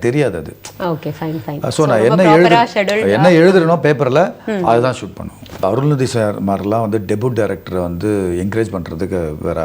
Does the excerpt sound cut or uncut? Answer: cut